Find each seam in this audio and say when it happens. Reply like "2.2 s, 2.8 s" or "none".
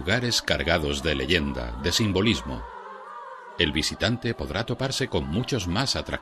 none